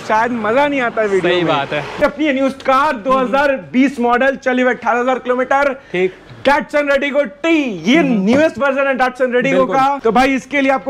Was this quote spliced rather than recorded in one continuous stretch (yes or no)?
yes